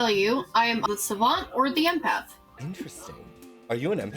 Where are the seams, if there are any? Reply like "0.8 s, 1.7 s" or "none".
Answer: 0.8 s, 2.5 s